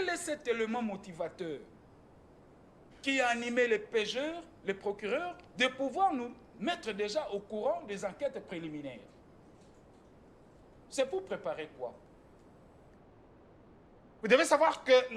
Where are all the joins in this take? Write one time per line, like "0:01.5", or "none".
0:12.1